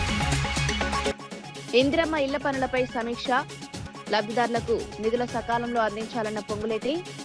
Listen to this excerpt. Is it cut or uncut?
uncut